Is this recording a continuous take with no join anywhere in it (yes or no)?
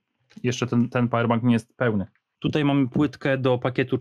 no